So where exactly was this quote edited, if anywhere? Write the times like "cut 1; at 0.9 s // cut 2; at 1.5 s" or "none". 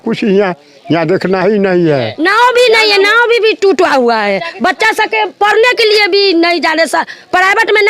cut 1; at 2.1 s